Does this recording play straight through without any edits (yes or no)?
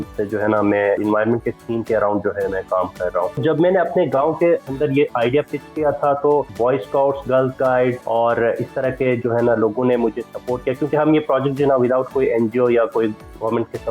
no